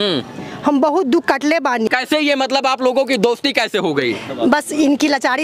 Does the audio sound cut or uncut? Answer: cut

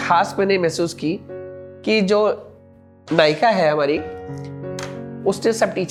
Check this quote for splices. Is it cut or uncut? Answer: uncut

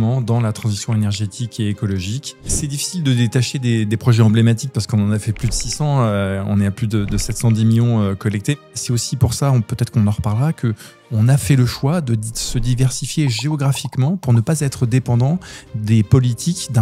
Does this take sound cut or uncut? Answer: cut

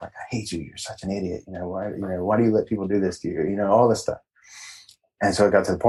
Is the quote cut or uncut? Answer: uncut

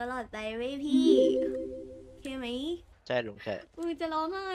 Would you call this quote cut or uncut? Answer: cut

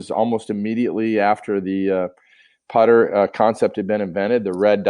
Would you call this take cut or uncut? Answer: uncut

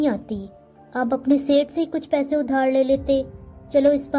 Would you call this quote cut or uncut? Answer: uncut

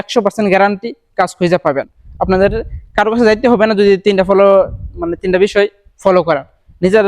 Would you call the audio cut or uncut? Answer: uncut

